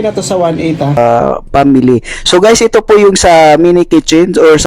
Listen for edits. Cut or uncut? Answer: cut